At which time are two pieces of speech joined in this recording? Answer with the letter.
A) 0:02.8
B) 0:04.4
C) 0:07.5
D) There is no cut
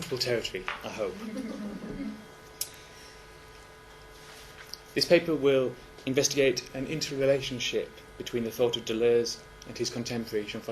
C